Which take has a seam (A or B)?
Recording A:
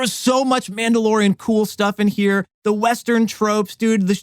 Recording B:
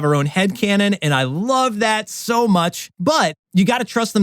B